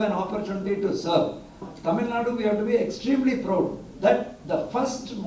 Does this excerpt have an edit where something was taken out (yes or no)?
yes